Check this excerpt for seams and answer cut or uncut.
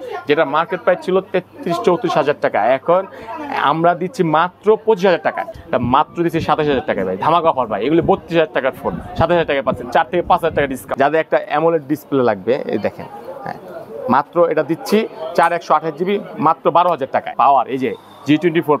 cut